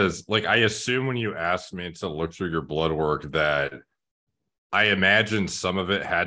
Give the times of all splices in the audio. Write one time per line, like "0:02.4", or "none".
none